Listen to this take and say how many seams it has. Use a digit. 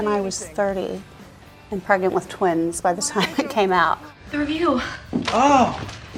1